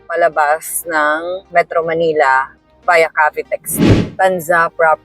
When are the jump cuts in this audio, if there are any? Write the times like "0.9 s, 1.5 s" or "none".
3.8 s